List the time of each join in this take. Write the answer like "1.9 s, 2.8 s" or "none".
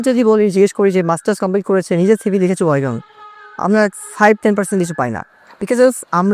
none